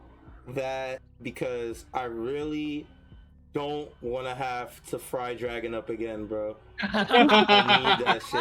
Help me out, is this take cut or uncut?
cut